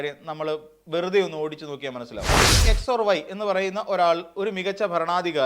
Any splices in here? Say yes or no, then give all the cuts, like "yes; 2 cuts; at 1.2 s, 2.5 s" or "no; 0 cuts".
yes; 1 cut; at 2.6 s